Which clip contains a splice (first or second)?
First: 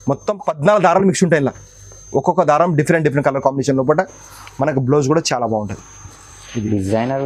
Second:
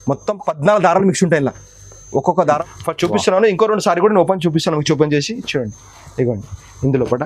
second